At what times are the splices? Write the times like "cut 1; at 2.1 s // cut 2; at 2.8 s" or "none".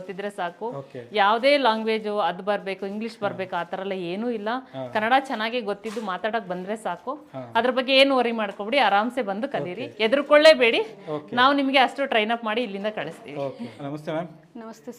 none